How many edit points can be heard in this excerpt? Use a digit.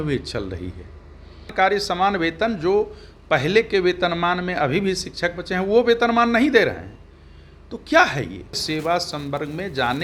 2